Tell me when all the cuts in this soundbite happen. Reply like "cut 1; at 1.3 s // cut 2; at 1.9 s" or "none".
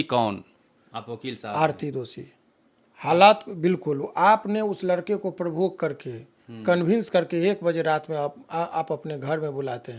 none